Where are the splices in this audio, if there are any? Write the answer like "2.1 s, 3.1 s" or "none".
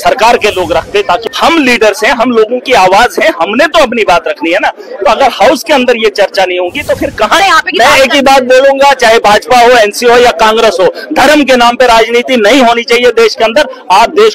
1.3 s, 7.4 s